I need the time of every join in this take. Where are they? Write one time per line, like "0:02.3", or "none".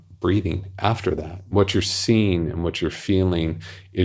0:01.4